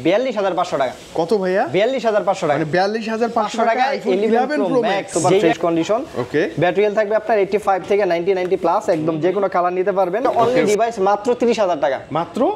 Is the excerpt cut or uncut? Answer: cut